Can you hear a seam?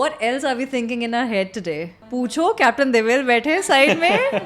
yes; 1 cut; at 2.0 s

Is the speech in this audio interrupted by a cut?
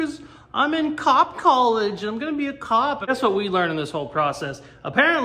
yes; 1 cut; at 3.1 s

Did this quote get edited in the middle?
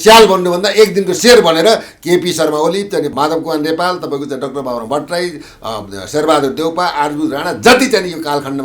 yes; 2 cuts; at 1.2 s, 3.1 s

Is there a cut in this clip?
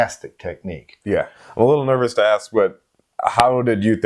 yes; 1 cut; at 1.4 s

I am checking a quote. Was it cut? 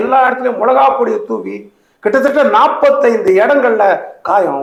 no; 0 cuts

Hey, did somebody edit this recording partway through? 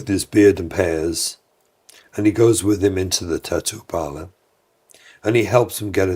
no; 0 cuts

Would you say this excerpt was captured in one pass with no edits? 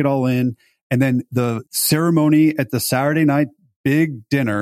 no; 1 cut; at 1.3 s

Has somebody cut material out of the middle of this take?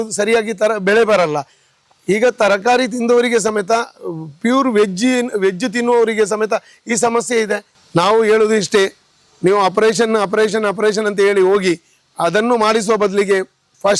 yes; 1 cut; at 7.7 s

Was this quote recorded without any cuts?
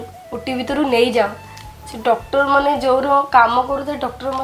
yes; 0 cuts

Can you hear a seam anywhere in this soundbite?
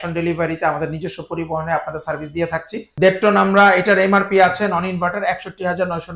yes; 1 cut; at 2.8 s

